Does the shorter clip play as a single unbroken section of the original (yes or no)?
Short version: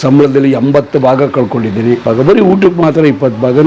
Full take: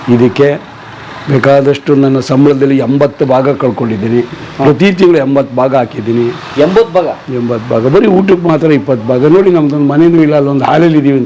no